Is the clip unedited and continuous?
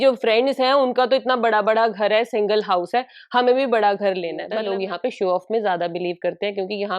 no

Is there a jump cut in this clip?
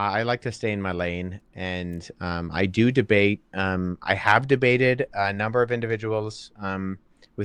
yes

